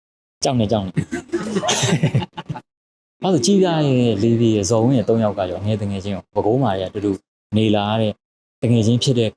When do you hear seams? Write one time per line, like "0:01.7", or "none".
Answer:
0:02.6